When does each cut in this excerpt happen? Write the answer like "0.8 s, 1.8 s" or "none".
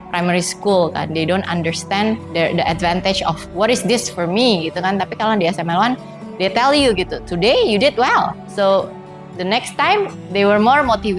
none